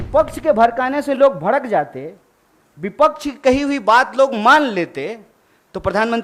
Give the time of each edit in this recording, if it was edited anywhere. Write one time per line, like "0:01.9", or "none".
none